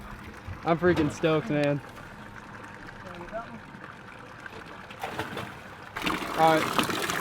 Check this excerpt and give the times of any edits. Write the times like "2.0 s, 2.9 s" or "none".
5.9 s